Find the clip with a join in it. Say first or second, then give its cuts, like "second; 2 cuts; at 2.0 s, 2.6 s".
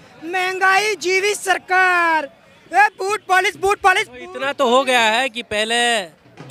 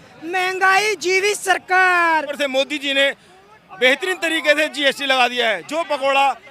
second; 1 cut; at 2.3 s